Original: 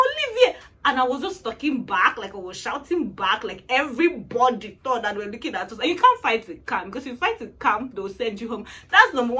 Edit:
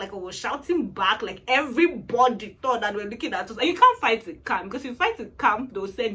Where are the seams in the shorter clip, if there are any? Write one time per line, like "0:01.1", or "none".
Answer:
none

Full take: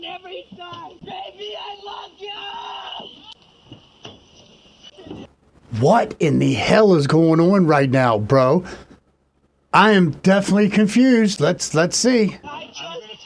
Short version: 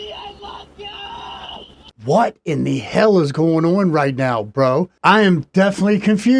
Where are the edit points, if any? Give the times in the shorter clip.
0:02.1
0:04.9

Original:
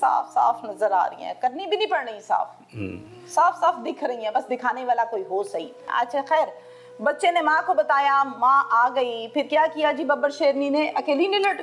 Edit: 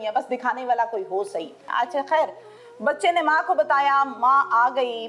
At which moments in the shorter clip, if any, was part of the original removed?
none

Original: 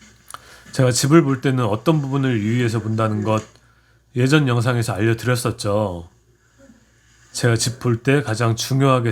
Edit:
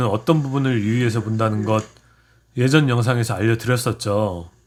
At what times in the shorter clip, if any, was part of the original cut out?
none

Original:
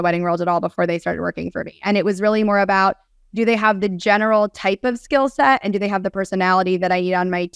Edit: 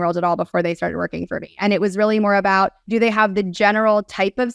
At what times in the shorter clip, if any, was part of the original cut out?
0:02.8

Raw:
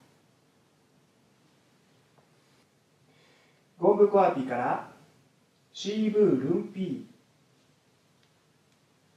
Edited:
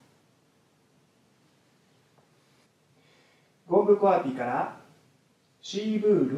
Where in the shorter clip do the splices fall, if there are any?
0:02.7

